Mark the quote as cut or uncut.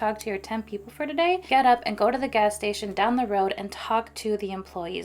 cut